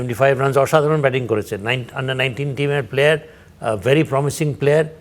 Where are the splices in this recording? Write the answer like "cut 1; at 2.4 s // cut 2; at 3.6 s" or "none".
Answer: none